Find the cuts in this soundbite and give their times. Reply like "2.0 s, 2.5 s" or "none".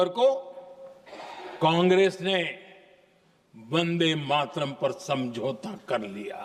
none